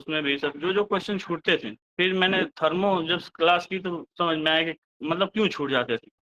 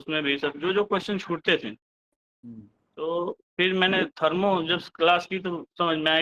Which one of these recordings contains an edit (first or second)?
first